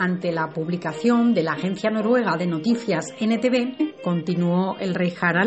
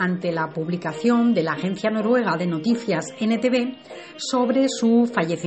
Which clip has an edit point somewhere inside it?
second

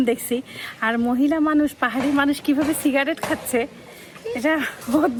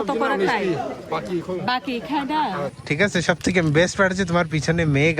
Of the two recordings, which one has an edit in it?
second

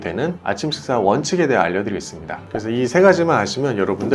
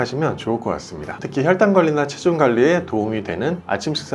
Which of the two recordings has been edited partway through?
second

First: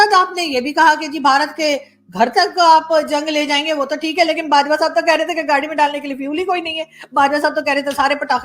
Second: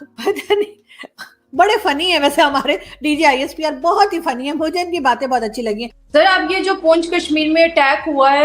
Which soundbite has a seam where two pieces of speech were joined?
second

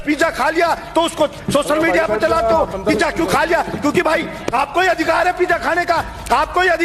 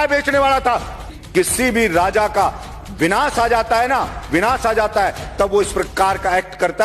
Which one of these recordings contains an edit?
second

